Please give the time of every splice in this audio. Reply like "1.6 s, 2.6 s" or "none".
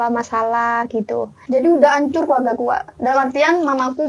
1.4 s